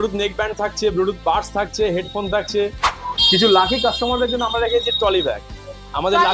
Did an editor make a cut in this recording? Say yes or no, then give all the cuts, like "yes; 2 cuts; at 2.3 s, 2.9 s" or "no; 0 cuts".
no; 0 cuts